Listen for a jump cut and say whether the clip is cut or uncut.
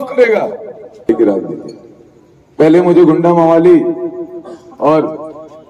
cut